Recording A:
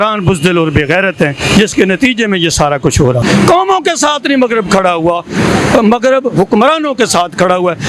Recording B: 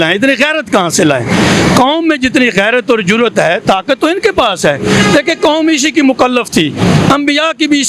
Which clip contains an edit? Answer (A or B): A